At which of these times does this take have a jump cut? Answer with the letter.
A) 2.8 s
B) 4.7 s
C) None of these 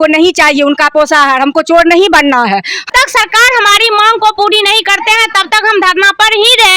A